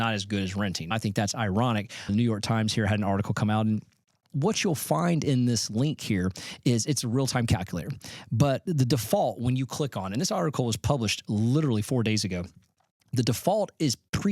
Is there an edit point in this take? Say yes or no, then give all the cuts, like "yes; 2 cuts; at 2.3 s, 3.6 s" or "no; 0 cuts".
yes; 3 cuts; at 0.9 s, 2.1 s, 4.3 s